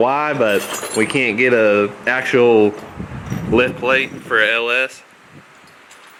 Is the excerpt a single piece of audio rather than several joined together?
yes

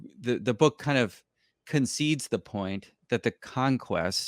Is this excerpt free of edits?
yes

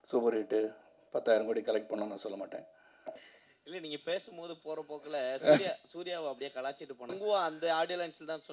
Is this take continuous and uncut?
no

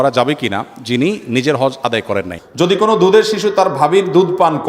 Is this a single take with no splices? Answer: no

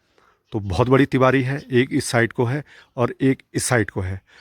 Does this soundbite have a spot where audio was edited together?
no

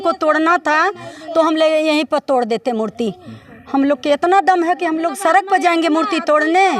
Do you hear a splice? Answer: no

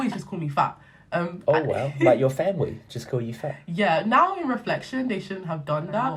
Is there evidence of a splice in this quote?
no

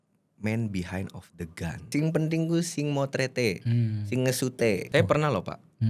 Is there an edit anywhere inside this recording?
yes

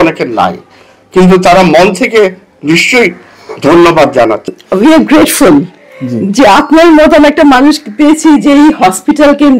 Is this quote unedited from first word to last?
no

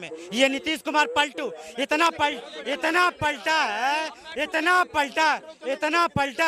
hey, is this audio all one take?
yes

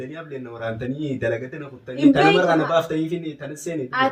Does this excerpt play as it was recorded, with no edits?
yes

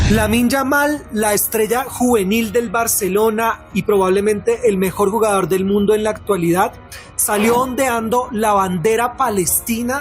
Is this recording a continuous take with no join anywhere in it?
yes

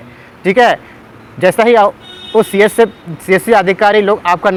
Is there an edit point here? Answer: no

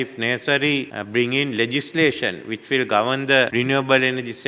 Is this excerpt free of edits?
no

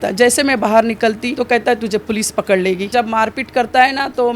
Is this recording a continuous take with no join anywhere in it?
no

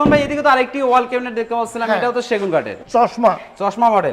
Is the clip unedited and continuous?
no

